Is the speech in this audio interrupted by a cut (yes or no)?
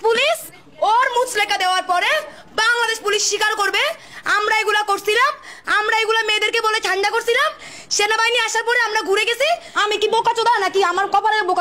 yes